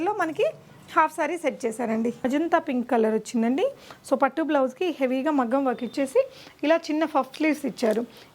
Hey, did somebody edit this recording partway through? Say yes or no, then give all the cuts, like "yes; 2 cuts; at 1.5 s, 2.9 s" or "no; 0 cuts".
yes; 1 cut; at 2.2 s